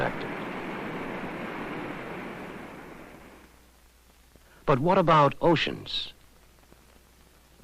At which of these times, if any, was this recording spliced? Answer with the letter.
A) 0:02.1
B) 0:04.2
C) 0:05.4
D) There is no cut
C